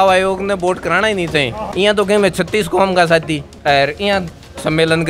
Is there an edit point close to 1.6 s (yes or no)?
yes